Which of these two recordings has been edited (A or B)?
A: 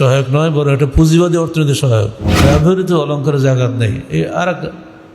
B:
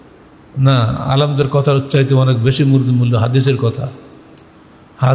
A